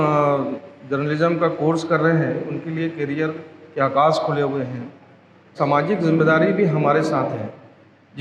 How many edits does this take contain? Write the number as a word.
one